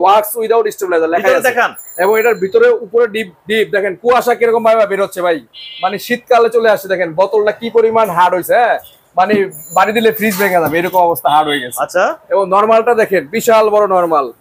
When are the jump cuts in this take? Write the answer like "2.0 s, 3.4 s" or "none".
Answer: none